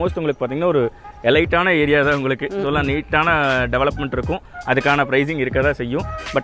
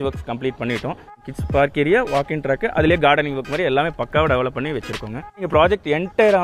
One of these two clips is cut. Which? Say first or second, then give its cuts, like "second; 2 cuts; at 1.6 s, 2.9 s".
second; 2 cuts; at 1.2 s, 5.4 s